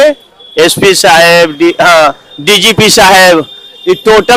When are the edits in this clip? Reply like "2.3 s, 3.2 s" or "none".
none

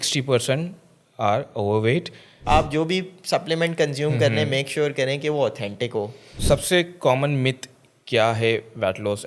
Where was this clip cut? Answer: 2.4 s, 6.3 s

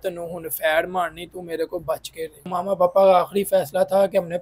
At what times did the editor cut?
2.5 s

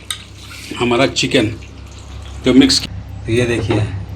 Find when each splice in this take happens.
2.8 s

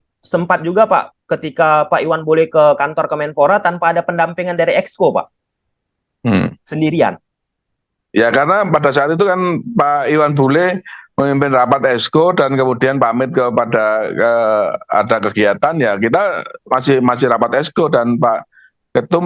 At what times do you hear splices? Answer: none

